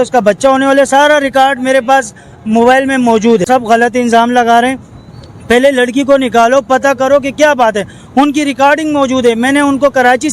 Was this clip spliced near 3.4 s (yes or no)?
yes